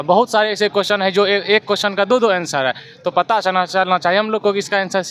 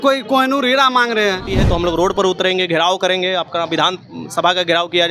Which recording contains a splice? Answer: second; 1 cut; at 1.5 s

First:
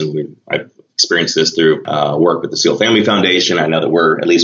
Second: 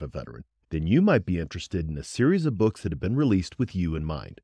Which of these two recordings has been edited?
first; 1 cut; at 1.9 s

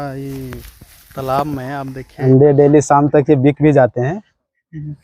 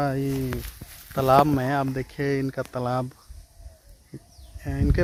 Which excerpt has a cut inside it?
first; 1 cut; at 2.2 s

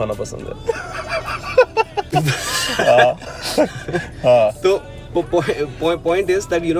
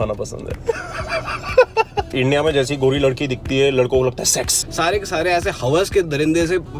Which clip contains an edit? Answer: second; 2 cuts; at 2.0 s, 4.7 s

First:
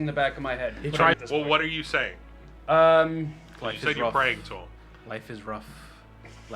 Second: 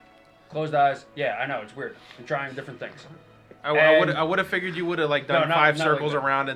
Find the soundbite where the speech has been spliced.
first; 1 cut; at 1.2 s

